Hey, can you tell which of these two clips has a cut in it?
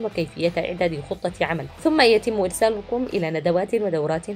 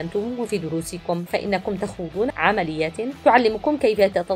second; 2 cuts; at 1.2 s, 2.3 s

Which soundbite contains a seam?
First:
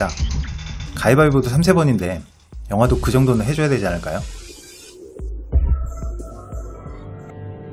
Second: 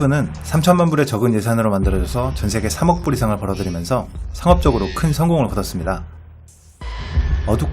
second; 1 cut; at 4.5 s

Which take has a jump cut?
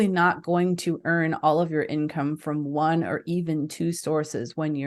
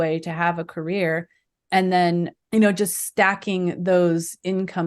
second; 1 cut; at 2.4 s

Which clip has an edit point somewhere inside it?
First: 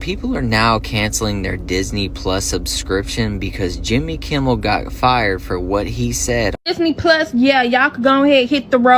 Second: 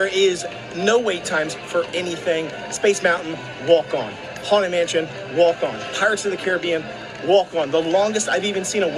first; 1 cut; at 6.6 s

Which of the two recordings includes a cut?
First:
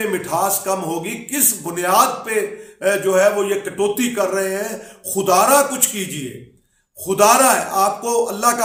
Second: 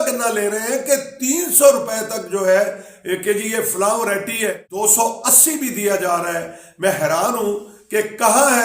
second; 2 cuts; at 4.7 s, 7.7 s

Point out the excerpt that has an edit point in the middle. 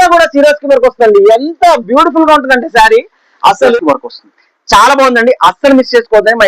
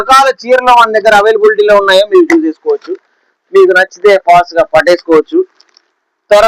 first; 1 cut; at 3.8 s

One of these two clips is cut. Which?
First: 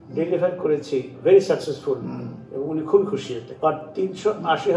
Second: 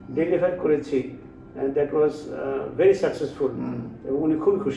first; 2 cuts; at 1.1 s, 3.4 s

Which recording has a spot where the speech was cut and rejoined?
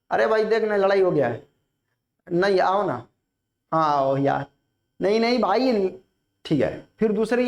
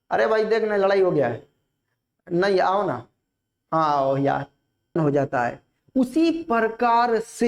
second; 1 cut; at 5.0 s

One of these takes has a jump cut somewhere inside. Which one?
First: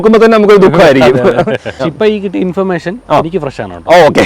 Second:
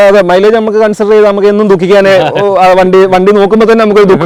first; 1 cut; at 1.7 s

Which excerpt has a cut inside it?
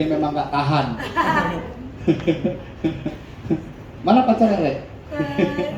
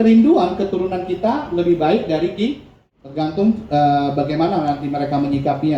second; 1 cut; at 2.7 s

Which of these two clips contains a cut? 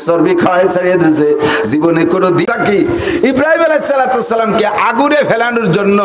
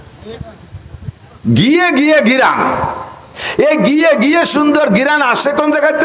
first; 1 cut; at 2.5 s

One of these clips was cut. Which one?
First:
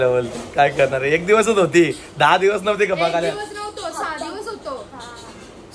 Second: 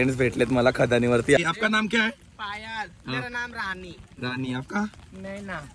second; 1 cut; at 1.4 s

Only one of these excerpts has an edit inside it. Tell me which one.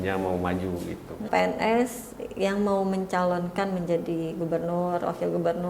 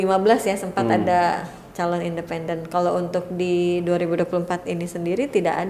first; 1 cut; at 1.2 s

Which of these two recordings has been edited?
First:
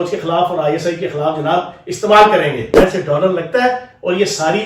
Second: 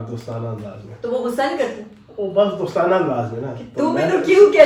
first; 1 cut; at 2.7 s

